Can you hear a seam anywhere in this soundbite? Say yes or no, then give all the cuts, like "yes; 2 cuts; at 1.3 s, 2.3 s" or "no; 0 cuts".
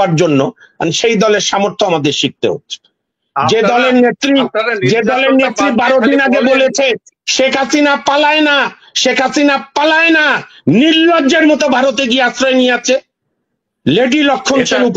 no; 0 cuts